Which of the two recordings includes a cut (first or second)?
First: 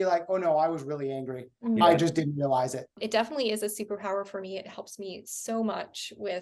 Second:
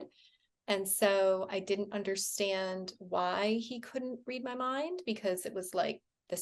first